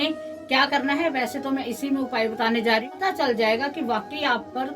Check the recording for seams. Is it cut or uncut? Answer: cut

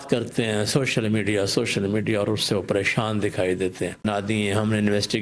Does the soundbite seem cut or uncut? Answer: cut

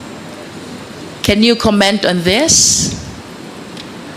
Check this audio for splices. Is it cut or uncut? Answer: uncut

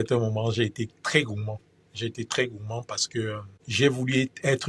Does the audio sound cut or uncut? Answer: uncut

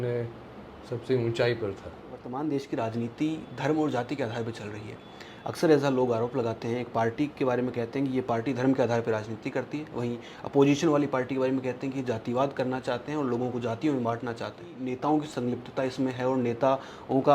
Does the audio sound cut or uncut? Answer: cut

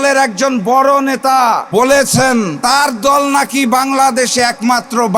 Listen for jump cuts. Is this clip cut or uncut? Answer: cut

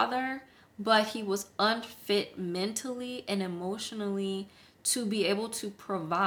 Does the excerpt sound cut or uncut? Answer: uncut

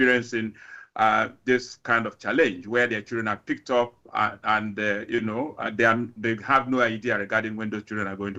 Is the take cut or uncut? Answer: uncut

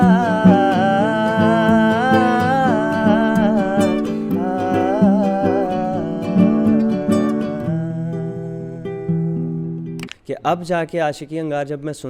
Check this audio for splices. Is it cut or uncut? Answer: cut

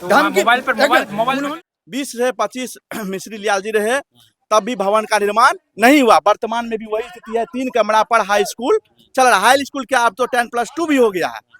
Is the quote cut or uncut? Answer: cut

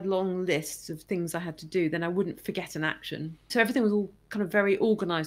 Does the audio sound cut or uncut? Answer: cut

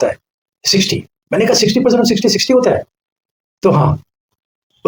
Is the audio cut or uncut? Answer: uncut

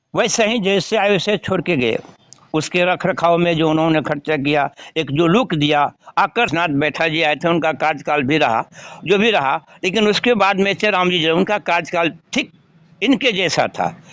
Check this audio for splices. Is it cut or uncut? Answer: cut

